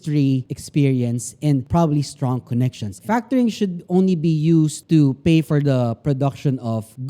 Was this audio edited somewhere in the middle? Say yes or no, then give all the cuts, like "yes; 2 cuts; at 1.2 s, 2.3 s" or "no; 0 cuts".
yes; 1 cut; at 3.0 s